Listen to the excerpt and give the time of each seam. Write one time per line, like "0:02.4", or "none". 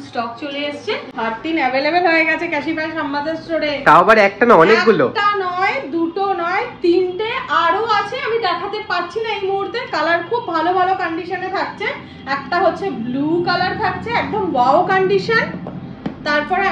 0:01.1